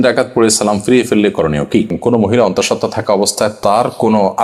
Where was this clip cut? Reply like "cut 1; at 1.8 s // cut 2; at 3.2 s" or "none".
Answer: cut 1; at 1.9 s